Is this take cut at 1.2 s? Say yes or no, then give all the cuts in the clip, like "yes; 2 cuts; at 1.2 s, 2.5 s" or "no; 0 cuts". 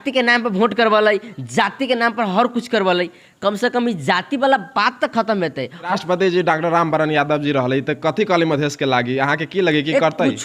no; 1 cut; at 5.9 s